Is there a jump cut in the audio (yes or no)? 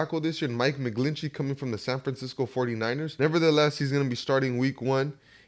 yes